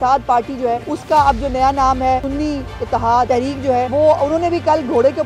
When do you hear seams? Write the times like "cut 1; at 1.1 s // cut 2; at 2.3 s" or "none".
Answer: cut 1; at 0.9 s // cut 2; at 2.3 s // cut 3; at 3.5 s